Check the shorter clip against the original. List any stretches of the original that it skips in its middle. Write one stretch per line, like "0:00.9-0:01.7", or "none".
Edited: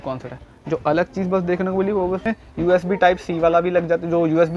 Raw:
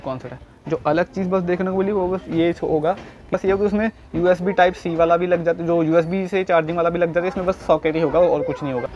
0:02.2-0:03.8

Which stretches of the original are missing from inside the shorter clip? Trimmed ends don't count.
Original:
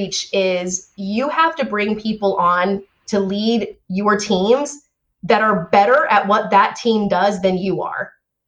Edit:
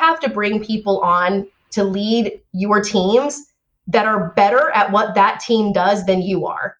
none

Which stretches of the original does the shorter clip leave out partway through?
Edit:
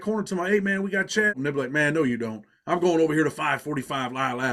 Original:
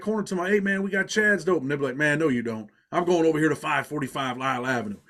0:01.3-0:01.6

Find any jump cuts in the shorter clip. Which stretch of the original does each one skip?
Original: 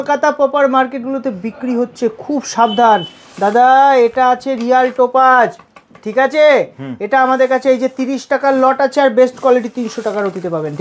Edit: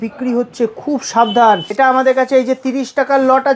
0:03.1-0:07.0

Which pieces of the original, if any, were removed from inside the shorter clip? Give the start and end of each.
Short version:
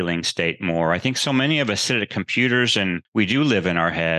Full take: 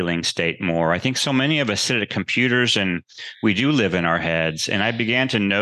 0:03.0-0:03.3

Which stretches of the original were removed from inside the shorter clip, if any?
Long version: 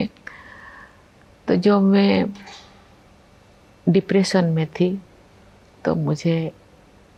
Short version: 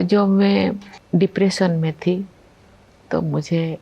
0:02.5-0:03.7

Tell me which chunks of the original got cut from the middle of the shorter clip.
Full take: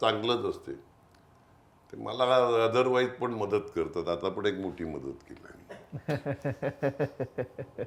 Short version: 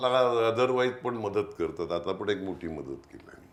none

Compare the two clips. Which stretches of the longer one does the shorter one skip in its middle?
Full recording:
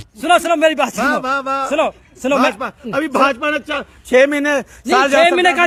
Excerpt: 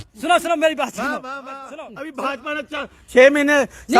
0:01.6-0:02.6

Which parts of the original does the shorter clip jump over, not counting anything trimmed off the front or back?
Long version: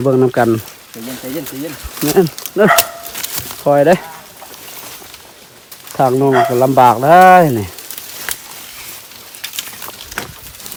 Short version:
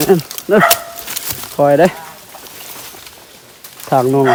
none

